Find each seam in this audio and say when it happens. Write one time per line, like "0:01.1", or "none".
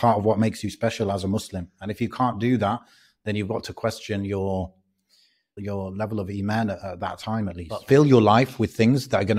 0:05.6
0:07.8